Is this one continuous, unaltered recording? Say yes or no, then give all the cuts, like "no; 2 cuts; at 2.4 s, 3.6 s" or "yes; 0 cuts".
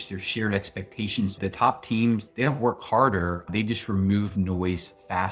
no; 3 cuts; at 1.4 s, 2.3 s, 3.5 s